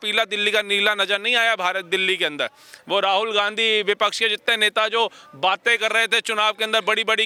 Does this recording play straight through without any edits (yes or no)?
yes